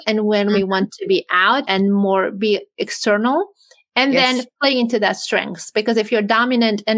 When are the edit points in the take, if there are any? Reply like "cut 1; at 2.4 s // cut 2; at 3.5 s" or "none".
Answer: cut 1; at 1.6 s

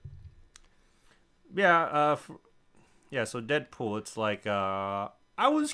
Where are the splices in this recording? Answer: cut 1; at 3.3 s

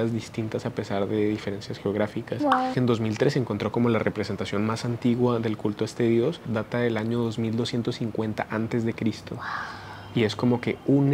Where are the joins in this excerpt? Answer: cut 1; at 2.7 s // cut 2; at 6.5 s

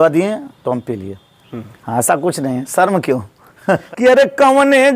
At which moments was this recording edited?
cut 1; at 3.8 s

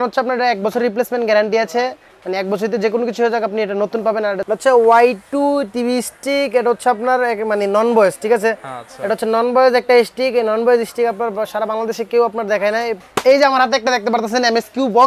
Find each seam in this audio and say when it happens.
cut 1; at 4.4 s // cut 2; at 13.0 s

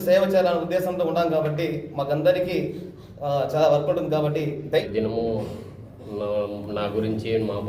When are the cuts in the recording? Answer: cut 1; at 4.8 s

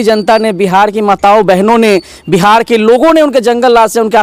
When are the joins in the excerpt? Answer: none

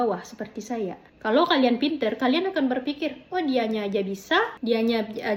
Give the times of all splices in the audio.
none

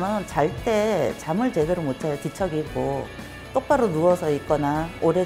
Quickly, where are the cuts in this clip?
none

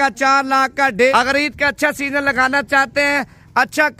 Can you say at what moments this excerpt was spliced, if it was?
cut 1; at 1.0 s

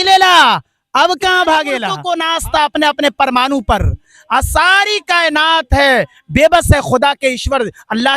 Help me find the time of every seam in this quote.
cut 1; at 1.9 s

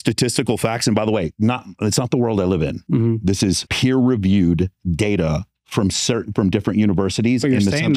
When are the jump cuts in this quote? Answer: none

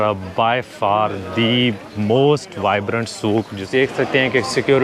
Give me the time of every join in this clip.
cut 1; at 3.6 s

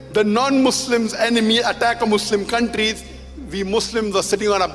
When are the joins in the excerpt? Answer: none

